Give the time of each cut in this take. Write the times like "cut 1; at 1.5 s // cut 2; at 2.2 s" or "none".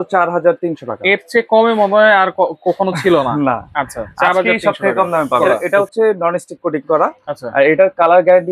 cut 1; at 5.4 s

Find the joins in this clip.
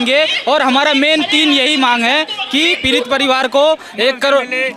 none

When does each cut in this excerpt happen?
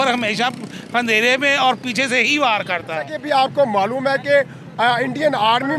cut 1; at 3.2 s

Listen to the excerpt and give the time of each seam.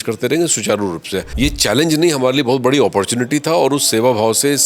cut 1; at 1.2 s

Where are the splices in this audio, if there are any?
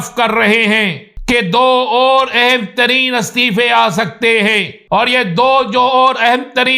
cut 1; at 1.1 s // cut 2; at 4.7 s

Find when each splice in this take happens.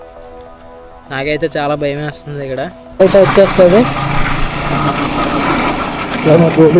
cut 1; at 1.0 s // cut 2; at 3.0 s

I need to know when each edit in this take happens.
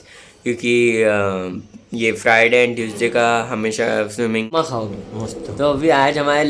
cut 1; at 4.5 s

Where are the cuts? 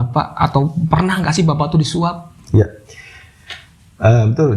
none

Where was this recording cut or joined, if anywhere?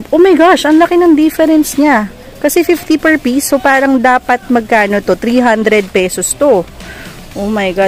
none

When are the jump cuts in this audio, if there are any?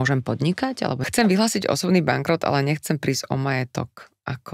cut 1; at 1.0 s

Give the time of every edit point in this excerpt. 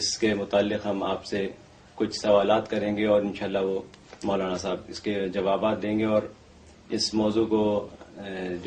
none

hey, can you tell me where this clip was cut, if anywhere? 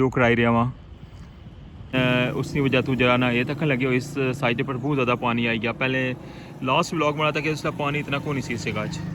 cut 1; at 1.9 s

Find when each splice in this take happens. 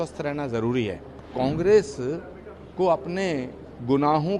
cut 1; at 1.3 s

